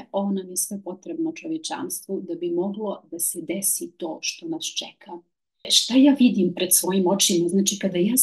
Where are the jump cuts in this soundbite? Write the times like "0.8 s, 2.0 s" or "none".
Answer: 5.7 s